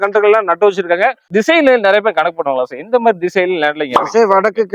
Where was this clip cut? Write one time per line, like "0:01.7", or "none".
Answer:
0:01.3